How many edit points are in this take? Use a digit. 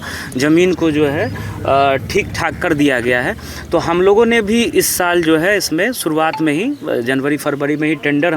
0